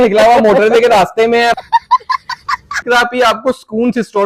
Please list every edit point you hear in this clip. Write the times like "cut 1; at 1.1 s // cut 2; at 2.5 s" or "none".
cut 1; at 1.6 s // cut 2; at 2.8 s

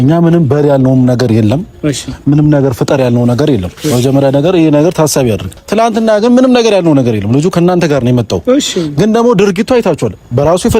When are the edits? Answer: cut 1; at 5.5 s

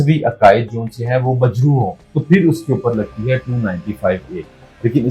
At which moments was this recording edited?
cut 1; at 2.1 s

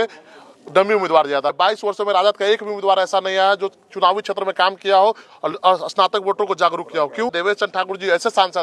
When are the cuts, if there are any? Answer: cut 1; at 1.5 s // cut 2; at 7.4 s

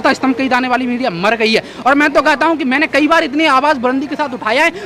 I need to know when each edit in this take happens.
none

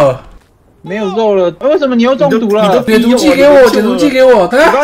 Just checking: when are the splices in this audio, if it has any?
none

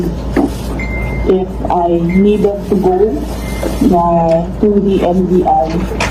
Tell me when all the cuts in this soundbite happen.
none

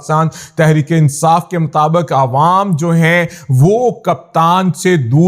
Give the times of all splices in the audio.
none

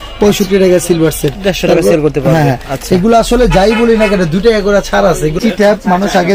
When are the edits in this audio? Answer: cut 1; at 5.4 s

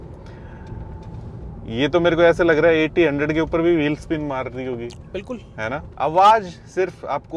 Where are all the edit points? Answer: none

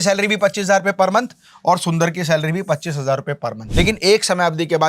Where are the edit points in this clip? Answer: cut 1; at 3.6 s

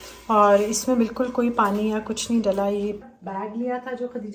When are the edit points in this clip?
cut 1; at 3.1 s

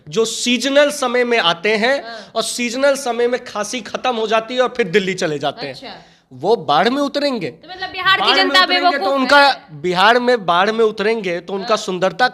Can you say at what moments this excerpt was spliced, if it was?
none

